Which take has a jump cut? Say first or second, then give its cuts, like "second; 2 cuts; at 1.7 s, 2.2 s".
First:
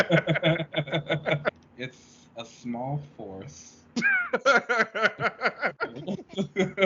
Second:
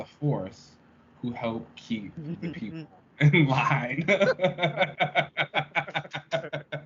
first; 1 cut; at 1.5 s